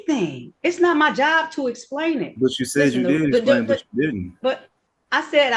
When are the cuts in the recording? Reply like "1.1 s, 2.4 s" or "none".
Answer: none